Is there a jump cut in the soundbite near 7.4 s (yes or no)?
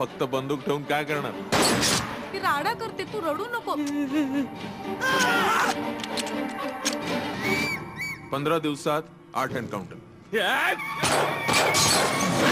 yes